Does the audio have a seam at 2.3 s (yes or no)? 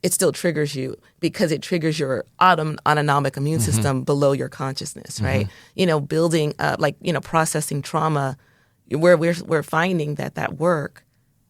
no